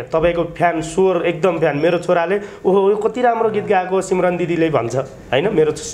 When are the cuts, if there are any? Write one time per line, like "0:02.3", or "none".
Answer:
none